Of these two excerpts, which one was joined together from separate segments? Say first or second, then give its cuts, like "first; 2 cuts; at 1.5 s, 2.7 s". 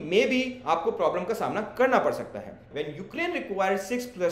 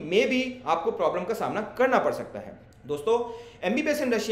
first; 1 cut; at 2.7 s